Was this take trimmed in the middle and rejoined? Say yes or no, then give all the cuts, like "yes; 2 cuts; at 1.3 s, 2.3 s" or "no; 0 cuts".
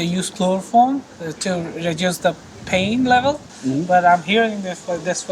yes; 2 cuts; at 1.1 s, 3.5 s